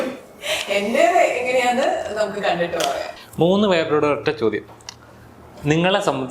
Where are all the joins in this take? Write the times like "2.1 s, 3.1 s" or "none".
3.1 s